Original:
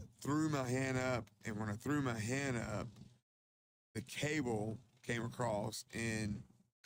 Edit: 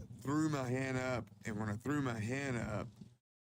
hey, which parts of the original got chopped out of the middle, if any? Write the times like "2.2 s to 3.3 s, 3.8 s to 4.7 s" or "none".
none